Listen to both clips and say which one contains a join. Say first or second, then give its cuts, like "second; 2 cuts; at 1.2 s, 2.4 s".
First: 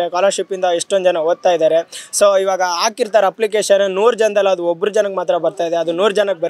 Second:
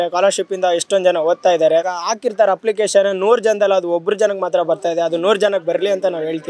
second; 1 cut; at 2.0 s